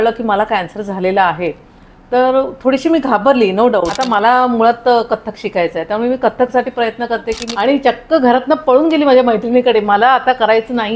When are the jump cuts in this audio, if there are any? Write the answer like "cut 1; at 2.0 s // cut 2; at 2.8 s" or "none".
cut 1; at 4.0 s // cut 2; at 7.4 s

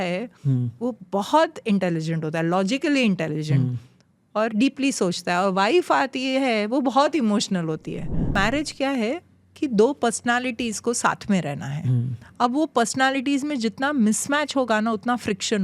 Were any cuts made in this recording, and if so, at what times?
cut 1; at 8.4 s

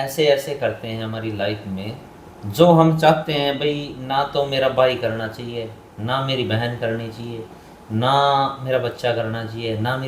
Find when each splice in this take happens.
none

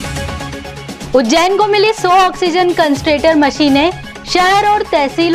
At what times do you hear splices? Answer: cut 1; at 1.0 s

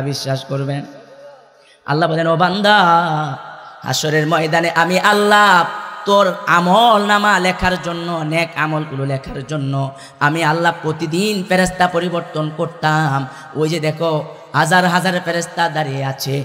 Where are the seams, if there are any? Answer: none

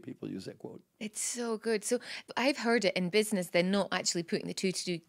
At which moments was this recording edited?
none

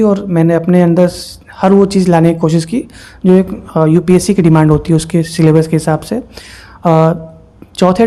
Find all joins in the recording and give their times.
none

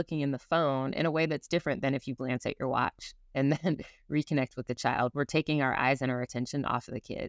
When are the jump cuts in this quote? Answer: none

